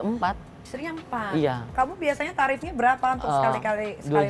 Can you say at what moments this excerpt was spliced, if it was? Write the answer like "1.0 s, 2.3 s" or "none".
1.8 s